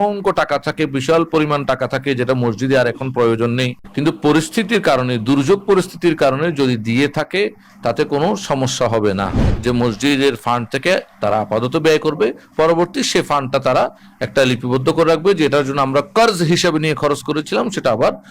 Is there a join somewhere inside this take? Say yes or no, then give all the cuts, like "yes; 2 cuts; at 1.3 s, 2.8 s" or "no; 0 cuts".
yes; 2 cuts; at 3.8 s, 9.4 s